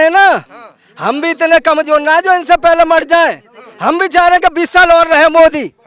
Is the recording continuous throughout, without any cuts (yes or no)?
yes